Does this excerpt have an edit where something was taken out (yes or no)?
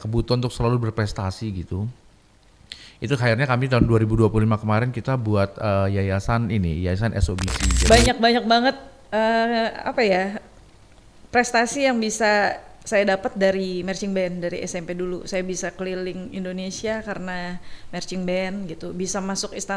yes